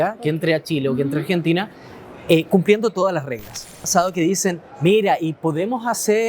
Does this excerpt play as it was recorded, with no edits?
no; 1 cut; at 3.8 s

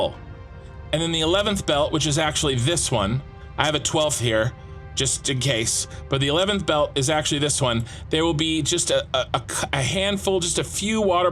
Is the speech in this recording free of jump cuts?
yes; 0 cuts

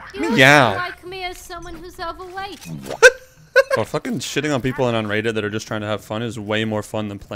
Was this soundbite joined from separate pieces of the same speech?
yes; 1 cut; at 3.8 s

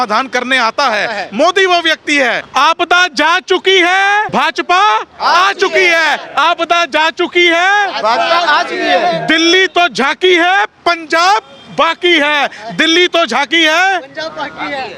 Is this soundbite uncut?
no; 2 cuts; at 2.4 s, 4.3 s

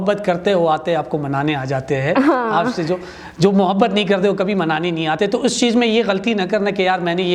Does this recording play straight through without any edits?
yes; 0 cuts

